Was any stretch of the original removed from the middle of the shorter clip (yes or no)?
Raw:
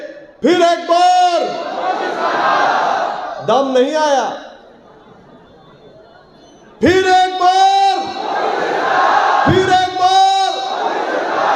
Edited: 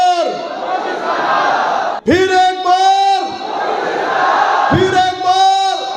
yes